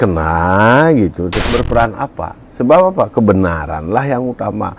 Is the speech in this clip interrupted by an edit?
yes; 1 cut; at 1.4 s

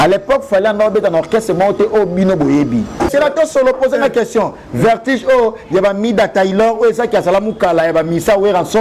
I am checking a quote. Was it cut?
yes; 1 cut; at 3.1 s

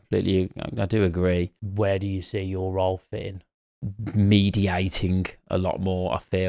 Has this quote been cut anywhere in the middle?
yes; 1 cut; at 1.6 s

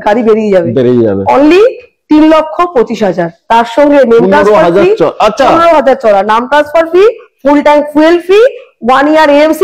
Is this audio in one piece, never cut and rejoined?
yes; 0 cuts

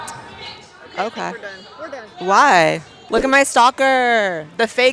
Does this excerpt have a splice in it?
yes; 1 cut; at 2.9 s

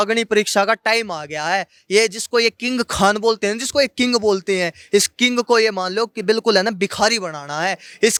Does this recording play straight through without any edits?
yes; 0 cuts

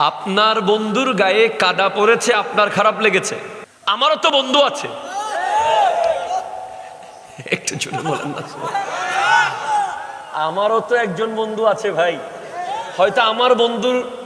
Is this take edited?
no; 0 cuts

